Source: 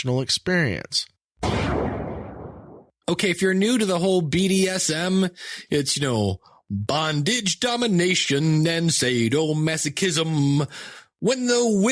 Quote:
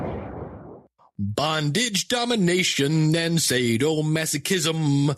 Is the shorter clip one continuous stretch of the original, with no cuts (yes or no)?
no